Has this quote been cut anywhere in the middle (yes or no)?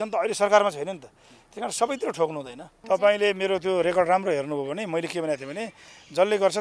yes